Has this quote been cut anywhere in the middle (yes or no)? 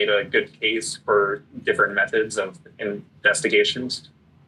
no